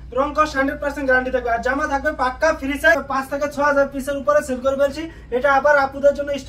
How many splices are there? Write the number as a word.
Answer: one